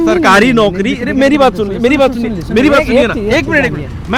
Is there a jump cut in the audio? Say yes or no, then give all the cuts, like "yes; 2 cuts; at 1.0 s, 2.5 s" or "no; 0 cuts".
no; 0 cuts